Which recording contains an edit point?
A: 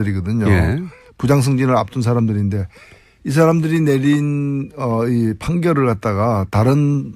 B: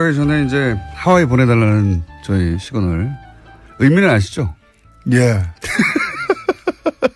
A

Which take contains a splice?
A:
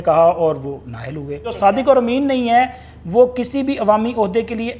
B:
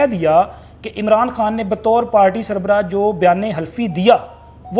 A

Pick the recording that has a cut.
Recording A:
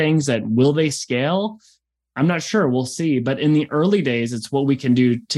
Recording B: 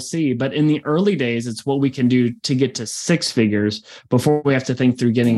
B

